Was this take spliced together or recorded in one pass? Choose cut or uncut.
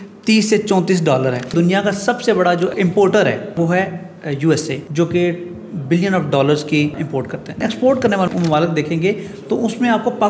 cut